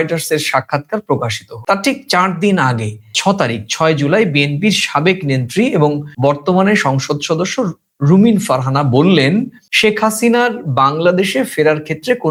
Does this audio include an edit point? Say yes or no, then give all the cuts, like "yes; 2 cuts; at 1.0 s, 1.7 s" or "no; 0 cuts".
no; 0 cuts